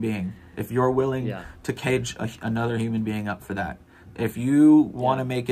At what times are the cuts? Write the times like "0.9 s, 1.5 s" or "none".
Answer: none